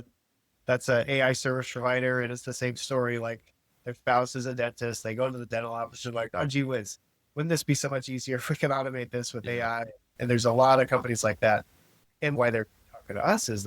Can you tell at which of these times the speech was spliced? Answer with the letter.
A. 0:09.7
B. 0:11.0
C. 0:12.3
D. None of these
C